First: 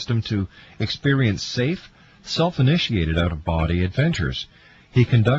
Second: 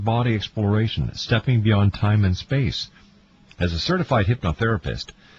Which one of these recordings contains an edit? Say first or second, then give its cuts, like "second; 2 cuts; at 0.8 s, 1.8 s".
first; 1 cut; at 4.2 s